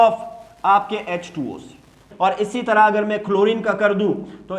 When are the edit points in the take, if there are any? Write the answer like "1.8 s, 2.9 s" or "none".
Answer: 2.1 s